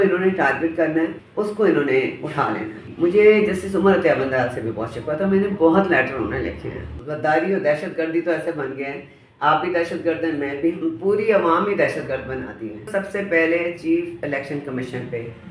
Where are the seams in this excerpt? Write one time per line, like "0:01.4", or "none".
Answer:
0:01.2
0:02.9
0:07.0
0:12.9